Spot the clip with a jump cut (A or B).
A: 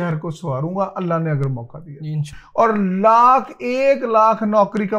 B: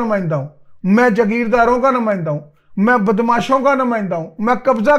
A